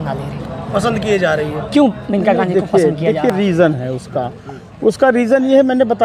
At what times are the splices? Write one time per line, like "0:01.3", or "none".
none